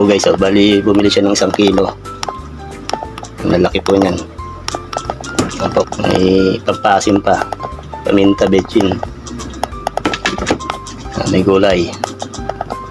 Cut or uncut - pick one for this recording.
cut